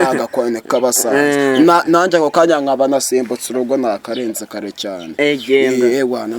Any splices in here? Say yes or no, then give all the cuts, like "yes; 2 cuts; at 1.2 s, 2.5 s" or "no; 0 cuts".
no; 0 cuts